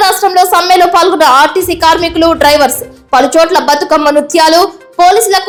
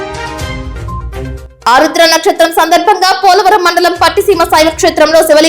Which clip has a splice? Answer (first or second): second